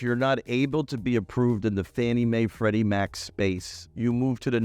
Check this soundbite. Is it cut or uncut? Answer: uncut